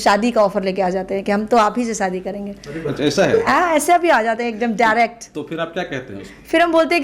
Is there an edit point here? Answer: no; 0 cuts

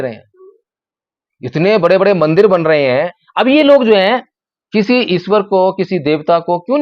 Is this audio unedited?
no; 1 cut; at 3.2 s

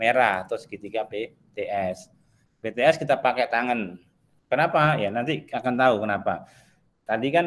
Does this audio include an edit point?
no; 0 cuts

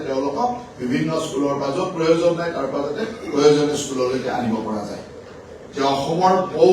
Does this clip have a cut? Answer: yes; 1 cut; at 5.6 s

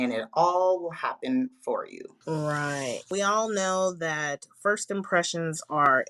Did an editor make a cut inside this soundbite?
yes; 2 cuts; at 2.1 s, 3.0 s

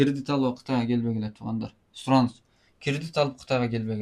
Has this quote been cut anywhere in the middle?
no; 0 cuts

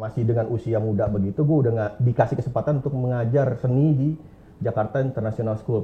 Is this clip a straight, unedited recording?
yes; 0 cuts

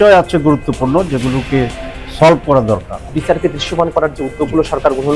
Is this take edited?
yes; 1 cut; at 3.1 s

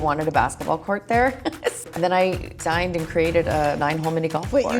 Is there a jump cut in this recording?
yes; 2 cuts; at 1.8 s, 2.6 s

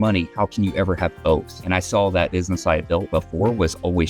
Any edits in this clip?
yes; 2 cuts; at 1.5 s, 2.8 s

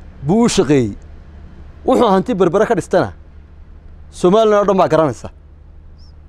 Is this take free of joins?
yes; 0 cuts

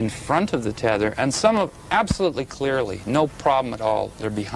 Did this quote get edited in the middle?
no; 0 cuts

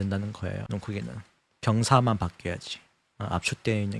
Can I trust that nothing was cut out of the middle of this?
yes; 0 cuts

